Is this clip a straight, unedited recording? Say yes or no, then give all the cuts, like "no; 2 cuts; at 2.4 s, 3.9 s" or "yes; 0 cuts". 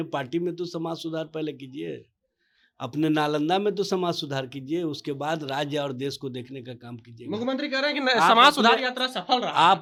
yes; 0 cuts